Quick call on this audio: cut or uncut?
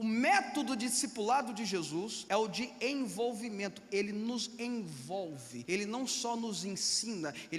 cut